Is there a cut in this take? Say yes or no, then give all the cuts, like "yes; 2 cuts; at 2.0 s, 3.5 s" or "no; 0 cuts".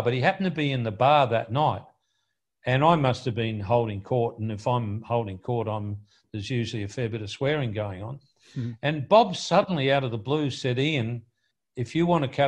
no; 0 cuts